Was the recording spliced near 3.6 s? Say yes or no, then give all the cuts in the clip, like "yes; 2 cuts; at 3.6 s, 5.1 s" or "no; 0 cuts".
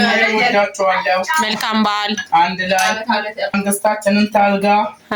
yes; 1 cut; at 3.6 s